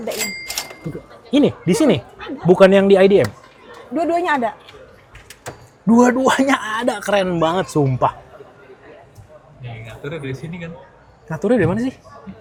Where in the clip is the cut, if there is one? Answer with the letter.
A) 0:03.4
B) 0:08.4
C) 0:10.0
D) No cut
D